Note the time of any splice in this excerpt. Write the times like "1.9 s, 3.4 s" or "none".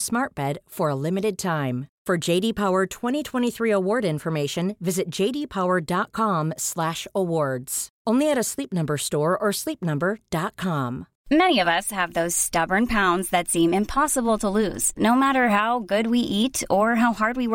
11.1 s